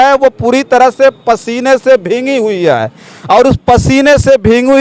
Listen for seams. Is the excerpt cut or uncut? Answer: uncut